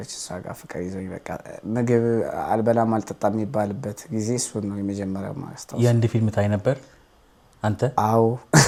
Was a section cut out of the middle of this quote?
no; 0 cuts

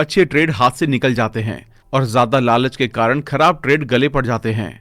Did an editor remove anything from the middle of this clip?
yes; 1 cut; at 1.0 s

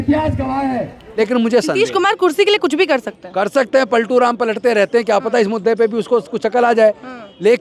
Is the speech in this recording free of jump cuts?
no; 1 cut; at 1.0 s

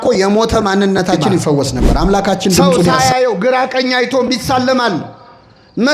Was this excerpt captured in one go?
no; 1 cut; at 2.9 s

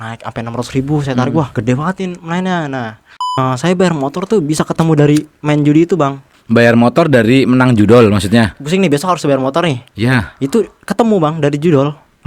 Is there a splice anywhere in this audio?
yes; 4 cuts; at 1.5 s, 3.4 s, 6.3 s, 8.6 s

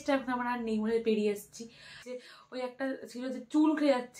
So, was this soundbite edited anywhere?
yes; 1 cut; at 2.0 s

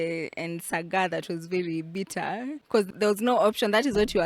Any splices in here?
yes; 1 cut; at 2.8 s

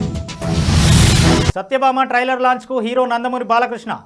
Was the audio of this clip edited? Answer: no; 0 cuts

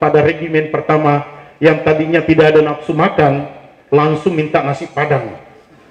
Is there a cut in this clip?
no; 0 cuts

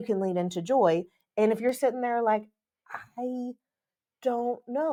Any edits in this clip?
no; 0 cuts

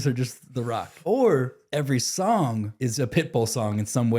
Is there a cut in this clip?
yes; 3 cuts; at 0.9 s, 1.6 s, 2.7 s

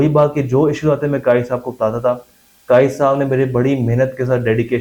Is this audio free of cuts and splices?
yes; 0 cuts

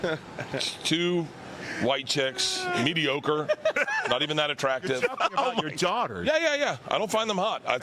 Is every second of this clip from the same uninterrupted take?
yes; 0 cuts

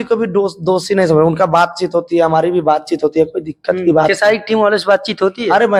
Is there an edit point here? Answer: no; 0 cuts

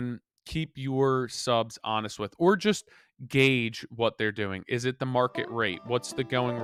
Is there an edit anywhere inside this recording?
no; 0 cuts

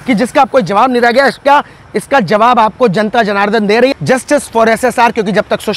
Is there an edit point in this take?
yes; 1 cut; at 3.9 s

